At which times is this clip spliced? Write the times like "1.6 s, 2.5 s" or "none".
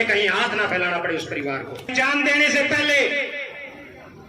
1.9 s